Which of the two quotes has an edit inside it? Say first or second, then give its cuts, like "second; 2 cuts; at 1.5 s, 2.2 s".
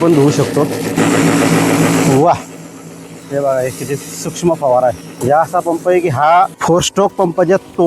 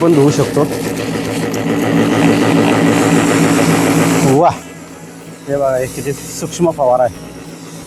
first; 3 cuts; at 1.0 s, 5.2 s, 6.6 s